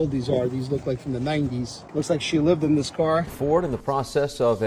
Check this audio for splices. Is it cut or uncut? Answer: cut